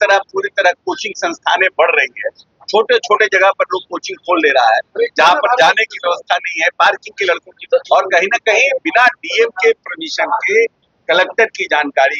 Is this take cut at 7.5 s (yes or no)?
yes